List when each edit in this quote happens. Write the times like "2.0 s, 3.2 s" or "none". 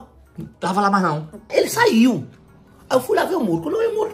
1.5 s

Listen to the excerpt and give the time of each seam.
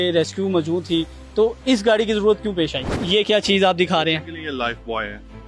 3.0 s

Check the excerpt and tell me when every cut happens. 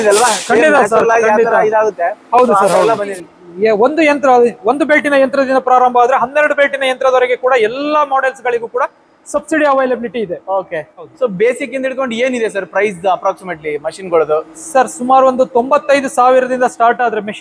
3.1 s, 11.1 s

